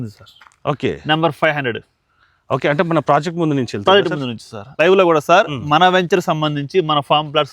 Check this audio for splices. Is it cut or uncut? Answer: cut